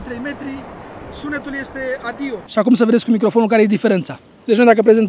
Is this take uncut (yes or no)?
no